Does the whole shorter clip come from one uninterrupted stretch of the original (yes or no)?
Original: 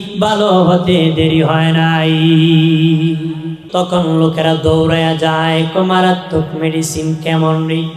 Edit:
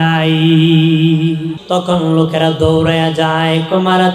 no